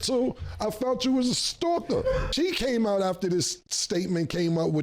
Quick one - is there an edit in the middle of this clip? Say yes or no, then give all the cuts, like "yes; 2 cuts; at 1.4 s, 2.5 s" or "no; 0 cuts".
yes; 1 cut; at 2.3 s